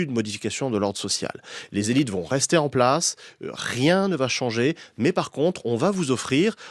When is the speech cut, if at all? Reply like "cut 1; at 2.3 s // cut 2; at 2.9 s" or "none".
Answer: none

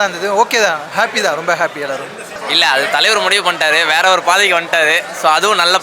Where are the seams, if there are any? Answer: cut 1; at 2.2 s

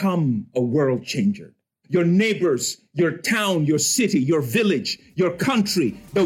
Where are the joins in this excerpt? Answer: cut 1; at 1.8 s

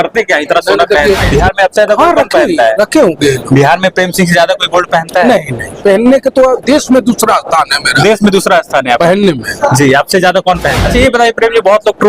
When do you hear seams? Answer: cut 1; at 1.3 s // cut 2; at 10.8 s

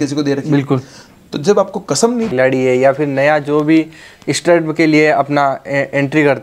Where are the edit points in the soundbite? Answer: cut 1; at 2.3 s

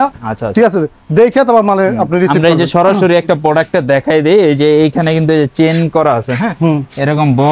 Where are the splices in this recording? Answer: none

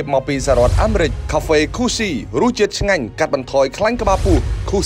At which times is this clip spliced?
cut 1; at 1.2 s

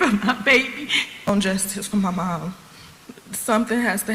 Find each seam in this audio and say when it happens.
cut 1; at 1.3 s

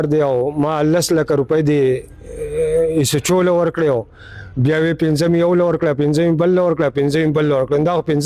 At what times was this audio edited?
none

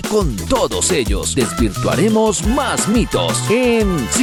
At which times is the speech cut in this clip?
none

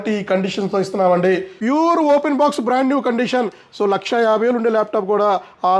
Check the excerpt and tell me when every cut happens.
cut 1; at 1.5 s

